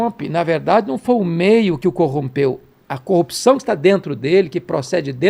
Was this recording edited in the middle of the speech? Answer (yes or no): no